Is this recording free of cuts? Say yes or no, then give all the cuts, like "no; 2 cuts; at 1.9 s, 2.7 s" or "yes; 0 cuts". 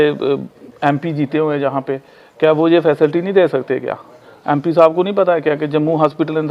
yes; 0 cuts